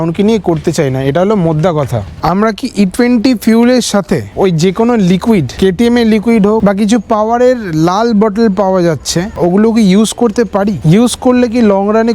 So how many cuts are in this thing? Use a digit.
3